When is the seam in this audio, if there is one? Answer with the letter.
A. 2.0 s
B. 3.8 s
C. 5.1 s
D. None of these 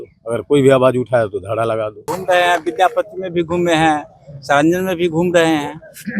A